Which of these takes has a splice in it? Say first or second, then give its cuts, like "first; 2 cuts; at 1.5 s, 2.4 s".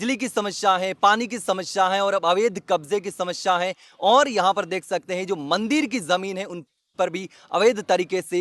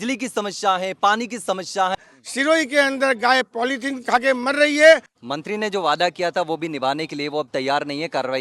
second; 2 cuts; at 1.9 s, 5.2 s